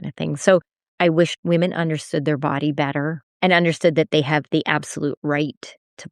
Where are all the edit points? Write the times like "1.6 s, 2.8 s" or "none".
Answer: 1.0 s, 3.2 s